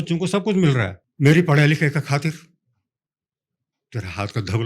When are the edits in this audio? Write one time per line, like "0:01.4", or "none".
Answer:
0:01.0